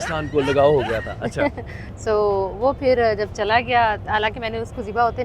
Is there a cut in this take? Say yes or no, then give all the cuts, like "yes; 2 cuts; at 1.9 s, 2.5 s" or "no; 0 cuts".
no; 0 cuts